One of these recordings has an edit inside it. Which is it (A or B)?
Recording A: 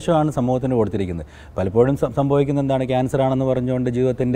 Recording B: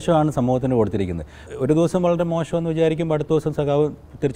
B